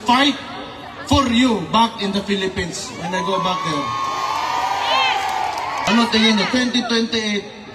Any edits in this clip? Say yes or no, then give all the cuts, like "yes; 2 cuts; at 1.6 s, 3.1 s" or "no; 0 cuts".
yes; 1 cut; at 5.8 s